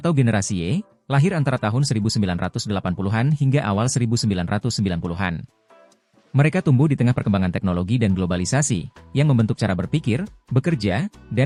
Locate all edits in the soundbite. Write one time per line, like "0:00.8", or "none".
none